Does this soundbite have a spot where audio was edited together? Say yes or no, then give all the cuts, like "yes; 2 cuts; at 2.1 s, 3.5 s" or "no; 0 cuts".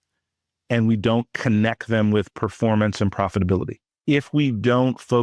yes; 1 cut; at 4.0 s